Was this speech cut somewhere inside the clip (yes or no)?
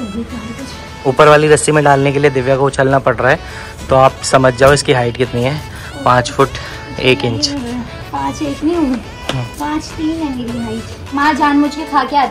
yes